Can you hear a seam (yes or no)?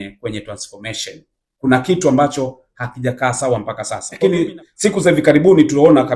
yes